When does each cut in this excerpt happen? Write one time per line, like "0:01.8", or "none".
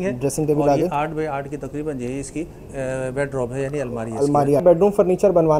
0:04.6